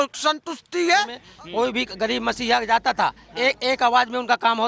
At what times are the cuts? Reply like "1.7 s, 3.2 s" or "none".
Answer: 1.2 s